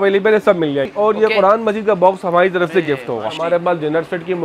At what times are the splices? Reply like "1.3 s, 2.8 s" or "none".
0.9 s, 3.4 s